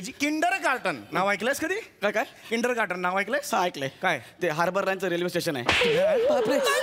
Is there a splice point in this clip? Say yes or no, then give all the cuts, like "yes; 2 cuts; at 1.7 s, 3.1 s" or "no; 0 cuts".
no; 0 cuts